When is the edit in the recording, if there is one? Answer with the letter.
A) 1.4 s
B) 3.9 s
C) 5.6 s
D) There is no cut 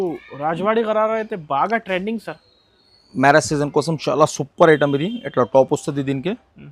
D